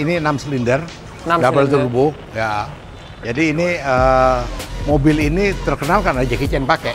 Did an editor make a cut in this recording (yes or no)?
no